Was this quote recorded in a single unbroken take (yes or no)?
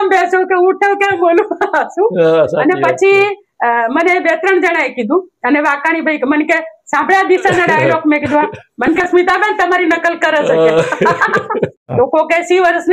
no